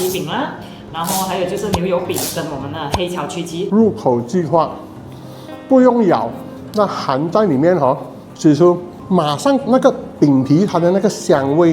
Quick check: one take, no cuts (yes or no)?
no